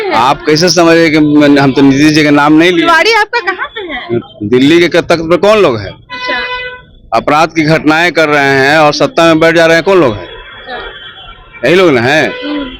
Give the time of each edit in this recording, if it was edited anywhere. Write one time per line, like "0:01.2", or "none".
0:04.2